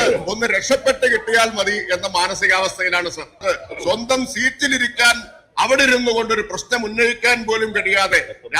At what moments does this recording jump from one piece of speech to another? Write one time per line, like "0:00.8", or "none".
0:03.3